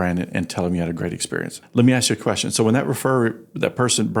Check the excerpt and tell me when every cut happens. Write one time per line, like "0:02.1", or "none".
0:01.6